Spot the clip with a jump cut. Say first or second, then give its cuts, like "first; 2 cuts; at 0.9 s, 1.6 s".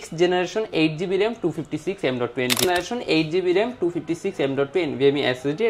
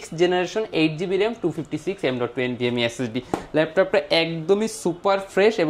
first; 1 cut; at 2.6 s